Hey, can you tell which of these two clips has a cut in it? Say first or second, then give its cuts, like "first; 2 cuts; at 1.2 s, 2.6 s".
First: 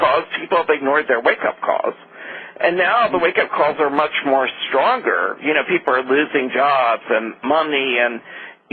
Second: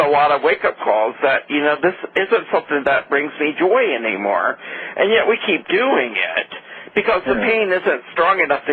first; 1 cut; at 4.7 s